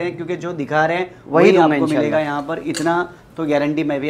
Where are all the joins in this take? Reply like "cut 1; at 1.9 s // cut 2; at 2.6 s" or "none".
none